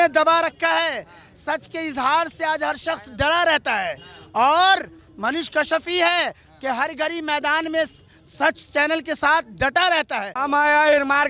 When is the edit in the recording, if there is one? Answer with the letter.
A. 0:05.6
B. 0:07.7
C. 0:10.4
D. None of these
C